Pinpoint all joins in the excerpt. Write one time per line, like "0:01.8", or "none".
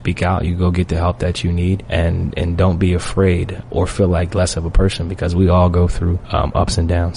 0:01.8
0:03.5
0:06.2